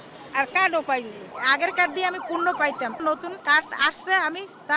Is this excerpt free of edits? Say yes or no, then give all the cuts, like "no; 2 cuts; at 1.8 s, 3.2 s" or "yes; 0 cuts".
no; 2 cuts; at 1.2 s, 3.0 s